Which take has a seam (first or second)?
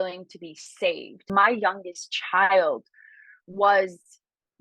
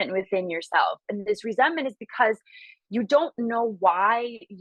first